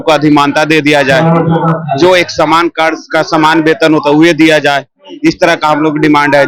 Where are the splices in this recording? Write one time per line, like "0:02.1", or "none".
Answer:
none